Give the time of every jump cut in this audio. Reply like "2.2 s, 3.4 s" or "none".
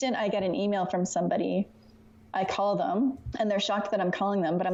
none